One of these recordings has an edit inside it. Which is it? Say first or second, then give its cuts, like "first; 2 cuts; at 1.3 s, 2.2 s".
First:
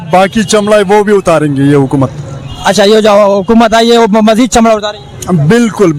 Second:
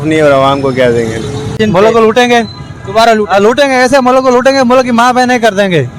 second; 1 cut; at 1.5 s